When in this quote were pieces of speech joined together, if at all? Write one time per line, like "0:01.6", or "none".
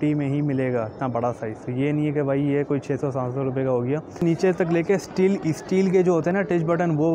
0:04.2